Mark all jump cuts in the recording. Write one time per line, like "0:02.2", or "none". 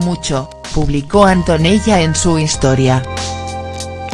0:03.1